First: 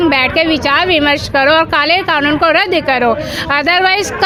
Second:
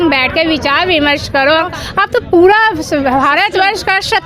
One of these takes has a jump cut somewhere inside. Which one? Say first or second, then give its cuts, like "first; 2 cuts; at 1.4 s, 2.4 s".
second; 1 cut; at 1.7 s